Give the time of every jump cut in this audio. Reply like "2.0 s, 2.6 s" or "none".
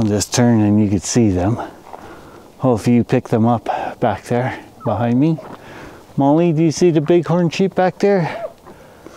none